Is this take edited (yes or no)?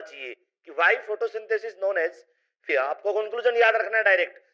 yes